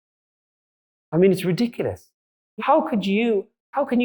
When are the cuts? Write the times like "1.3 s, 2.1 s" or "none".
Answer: 2.4 s